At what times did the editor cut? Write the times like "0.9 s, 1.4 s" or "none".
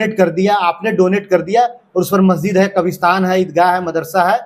none